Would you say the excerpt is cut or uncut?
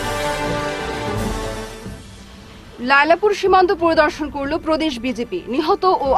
uncut